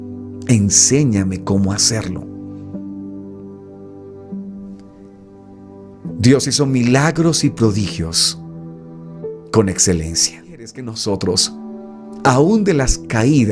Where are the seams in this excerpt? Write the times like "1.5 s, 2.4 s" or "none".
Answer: 10.8 s